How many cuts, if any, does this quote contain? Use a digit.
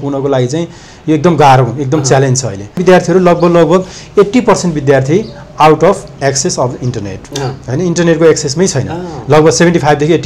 1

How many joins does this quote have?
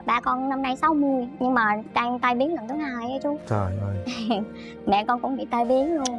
0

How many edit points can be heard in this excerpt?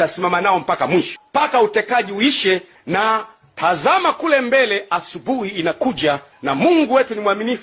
2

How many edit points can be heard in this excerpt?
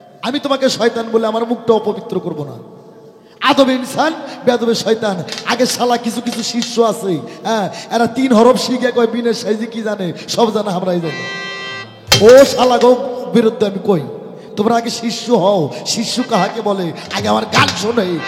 0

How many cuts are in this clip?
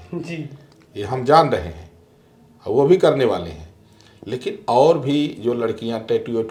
0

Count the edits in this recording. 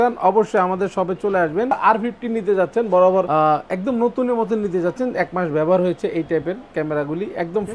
1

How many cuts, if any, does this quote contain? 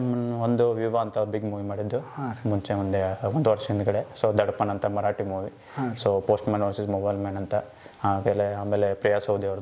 0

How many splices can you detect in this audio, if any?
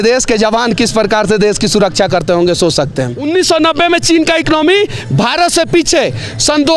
1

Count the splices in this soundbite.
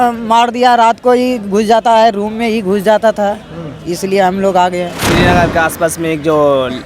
1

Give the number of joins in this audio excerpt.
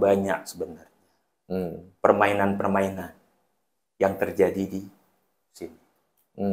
0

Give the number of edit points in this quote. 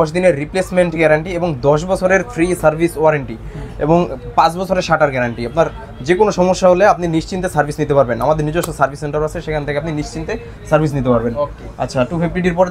0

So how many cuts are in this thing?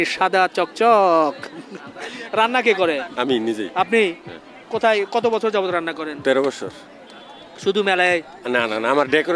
0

